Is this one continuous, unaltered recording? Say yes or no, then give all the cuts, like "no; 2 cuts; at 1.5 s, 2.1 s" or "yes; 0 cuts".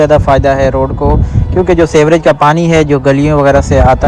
yes; 0 cuts